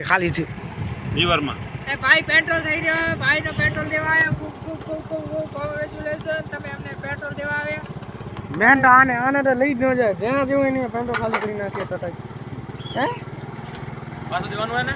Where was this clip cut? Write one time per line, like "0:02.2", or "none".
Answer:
none